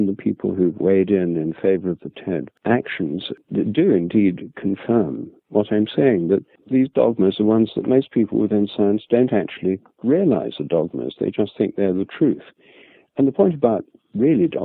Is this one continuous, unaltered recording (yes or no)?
no